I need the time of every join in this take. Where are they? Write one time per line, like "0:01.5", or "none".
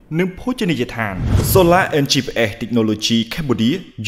0:01.4

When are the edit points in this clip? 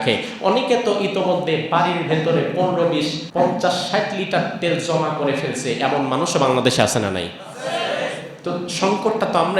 0:03.2

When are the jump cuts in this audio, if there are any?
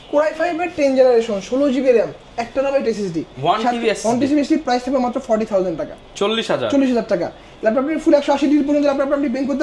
none

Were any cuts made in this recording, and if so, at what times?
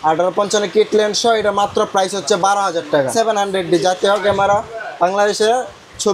0:03.1

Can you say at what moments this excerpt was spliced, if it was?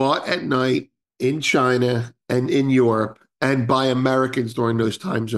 0:01.0

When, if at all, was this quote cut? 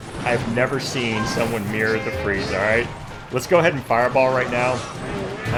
none

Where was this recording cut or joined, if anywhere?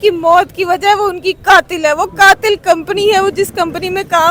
none

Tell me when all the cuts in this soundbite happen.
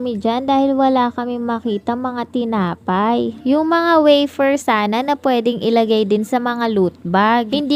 none

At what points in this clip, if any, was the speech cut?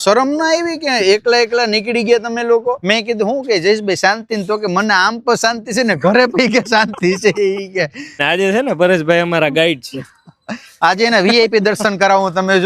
0:02.8
0:08.2

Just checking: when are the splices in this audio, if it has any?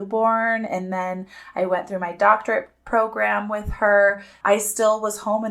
0:04.3

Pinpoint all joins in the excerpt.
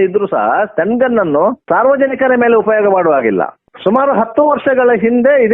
0:03.6

